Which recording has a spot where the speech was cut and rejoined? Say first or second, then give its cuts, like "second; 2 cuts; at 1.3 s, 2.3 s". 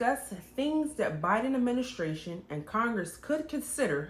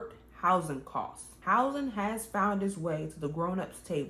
second; 1 cut; at 1.3 s